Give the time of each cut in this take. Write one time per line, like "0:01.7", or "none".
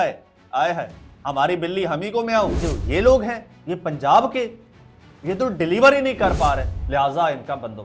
0:02.6
0:03.5
0:06.7